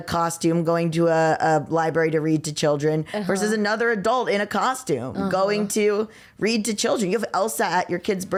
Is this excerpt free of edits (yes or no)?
yes